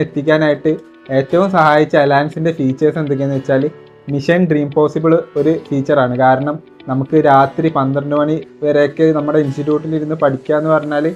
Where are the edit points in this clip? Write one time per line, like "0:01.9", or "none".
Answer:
none